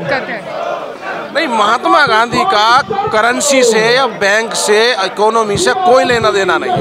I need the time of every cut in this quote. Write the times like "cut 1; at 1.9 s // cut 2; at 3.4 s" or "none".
none